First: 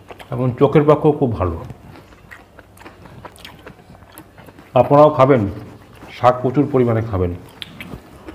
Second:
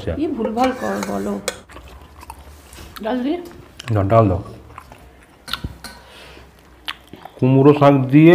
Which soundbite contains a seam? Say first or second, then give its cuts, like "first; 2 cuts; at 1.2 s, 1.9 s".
second; 2 cuts; at 1.7 s, 5.4 s